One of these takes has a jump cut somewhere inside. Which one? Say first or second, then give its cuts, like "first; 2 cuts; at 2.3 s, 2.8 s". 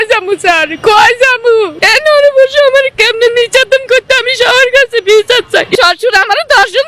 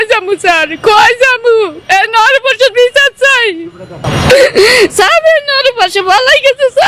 first; 2 cuts; at 1.8 s, 5.7 s